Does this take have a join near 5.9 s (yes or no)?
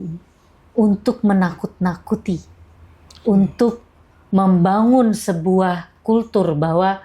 yes